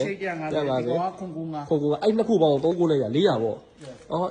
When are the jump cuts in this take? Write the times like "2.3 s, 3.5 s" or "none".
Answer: 2.7 s